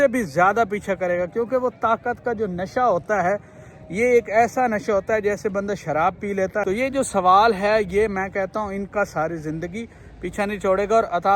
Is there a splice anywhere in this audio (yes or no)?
yes